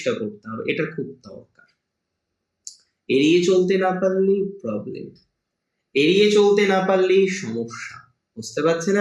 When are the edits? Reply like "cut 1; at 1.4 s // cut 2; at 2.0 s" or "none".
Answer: none

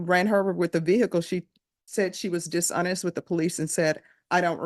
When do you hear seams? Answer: none

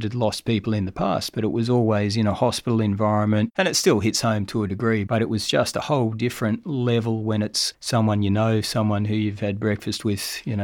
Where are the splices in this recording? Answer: cut 1; at 3.5 s

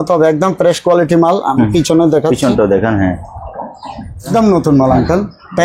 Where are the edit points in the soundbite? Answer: cut 1; at 4.3 s

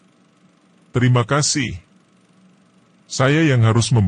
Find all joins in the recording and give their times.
cut 1; at 0.9 s

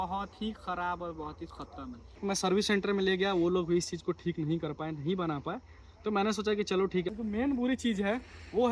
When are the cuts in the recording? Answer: cut 1; at 2.2 s // cut 2; at 7.6 s

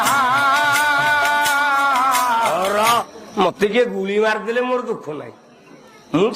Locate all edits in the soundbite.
cut 1; at 3.2 s

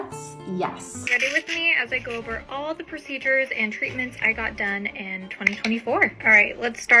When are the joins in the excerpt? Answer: cut 1; at 1.1 s

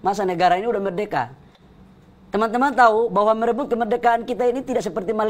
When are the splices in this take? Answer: none

